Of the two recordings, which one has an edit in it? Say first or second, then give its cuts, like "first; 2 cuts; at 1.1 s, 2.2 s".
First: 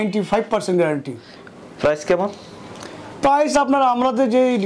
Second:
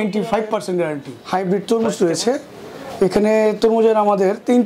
second; 1 cut; at 1.1 s